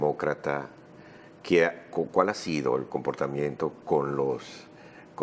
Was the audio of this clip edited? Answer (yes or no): no